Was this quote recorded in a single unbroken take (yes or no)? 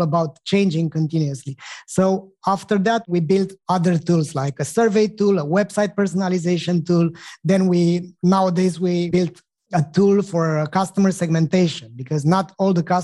no